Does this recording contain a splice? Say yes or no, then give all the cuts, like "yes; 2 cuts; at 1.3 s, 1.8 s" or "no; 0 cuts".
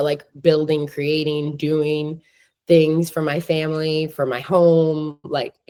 no; 0 cuts